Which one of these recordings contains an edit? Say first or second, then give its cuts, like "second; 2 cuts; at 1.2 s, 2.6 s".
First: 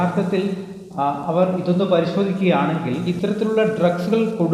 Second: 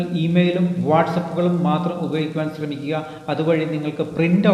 first; 1 cut; at 3.1 s